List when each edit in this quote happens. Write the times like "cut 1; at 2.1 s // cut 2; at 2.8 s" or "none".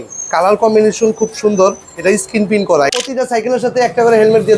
cut 1; at 2.9 s